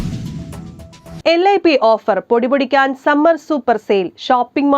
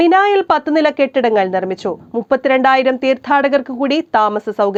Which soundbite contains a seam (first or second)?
first